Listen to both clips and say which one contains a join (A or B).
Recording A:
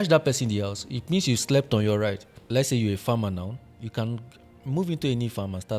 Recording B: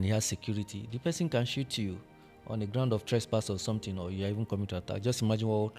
A